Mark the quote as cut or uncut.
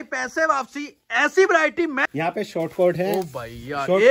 cut